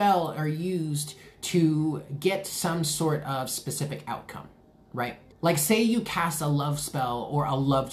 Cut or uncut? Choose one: cut